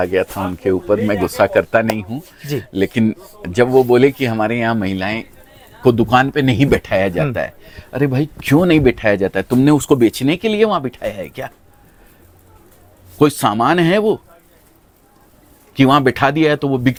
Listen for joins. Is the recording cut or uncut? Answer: uncut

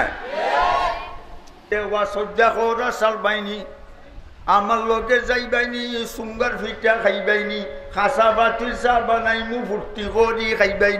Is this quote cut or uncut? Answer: cut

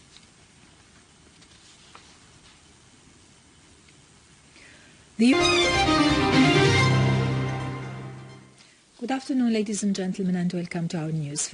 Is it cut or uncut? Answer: uncut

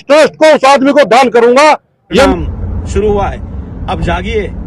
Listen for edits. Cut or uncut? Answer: cut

